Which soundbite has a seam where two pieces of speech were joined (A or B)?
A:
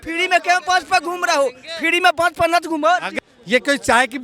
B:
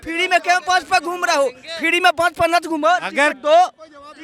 A